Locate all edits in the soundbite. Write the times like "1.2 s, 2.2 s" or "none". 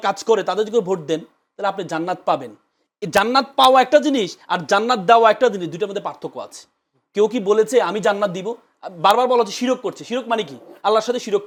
none